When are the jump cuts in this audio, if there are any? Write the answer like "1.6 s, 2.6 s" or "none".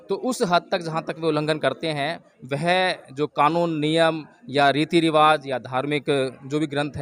none